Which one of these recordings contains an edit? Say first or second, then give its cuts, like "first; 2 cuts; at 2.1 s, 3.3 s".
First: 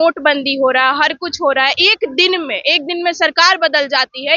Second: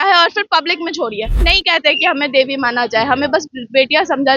second; 1 cut; at 1.4 s